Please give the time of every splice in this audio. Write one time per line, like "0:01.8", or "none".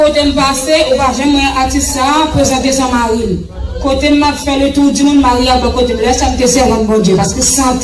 none